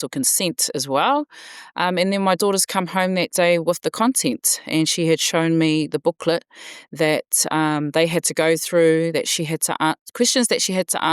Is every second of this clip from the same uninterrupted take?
yes; 0 cuts

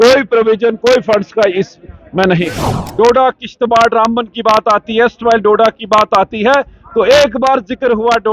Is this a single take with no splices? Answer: no; 1 cut; at 2.8 s

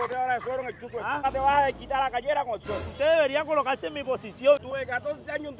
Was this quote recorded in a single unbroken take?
no; 3 cuts; at 1.2 s, 2.8 s, 4.6 s

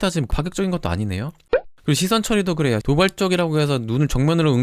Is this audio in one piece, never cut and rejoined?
no; 2 cuts; at 1.5 s, 2.8 s

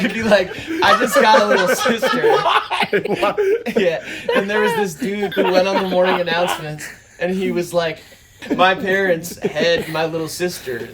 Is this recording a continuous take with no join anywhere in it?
no; 2 cuts; at 5.3 s, 8.4 s

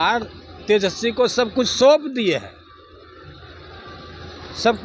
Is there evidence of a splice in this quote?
no; 0 cuts

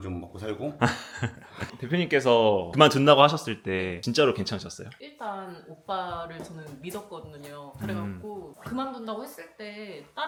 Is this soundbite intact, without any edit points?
yes; 0 cuts

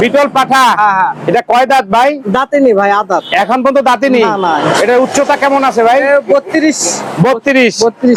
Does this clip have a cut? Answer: no; 0 cuts

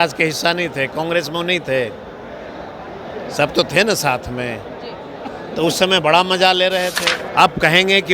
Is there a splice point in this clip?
yes; 1 cut; at 7.0 s

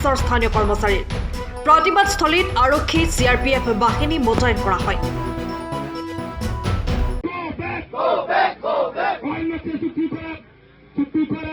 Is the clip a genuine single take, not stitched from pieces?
yes; 0 cuts

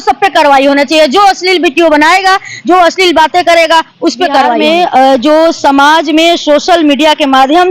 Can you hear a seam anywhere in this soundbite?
yes; 1 cut; at 4.5 s

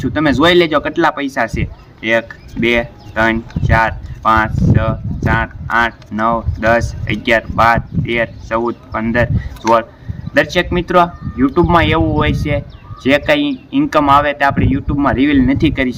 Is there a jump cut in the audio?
no; 0 cuts

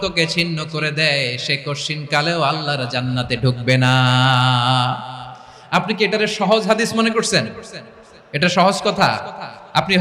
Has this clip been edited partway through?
no; 0 cuts

